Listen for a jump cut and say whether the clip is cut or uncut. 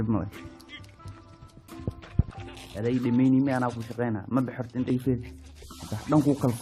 uncut